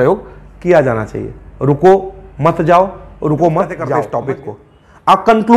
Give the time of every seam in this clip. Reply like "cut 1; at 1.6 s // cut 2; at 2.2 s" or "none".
cut 1; at 3.9 s